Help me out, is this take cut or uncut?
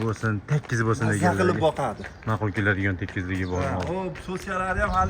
uncut